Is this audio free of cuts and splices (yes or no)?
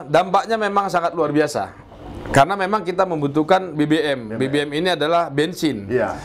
yes